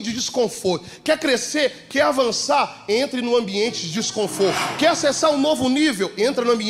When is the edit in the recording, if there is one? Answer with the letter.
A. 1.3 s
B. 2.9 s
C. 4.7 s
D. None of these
C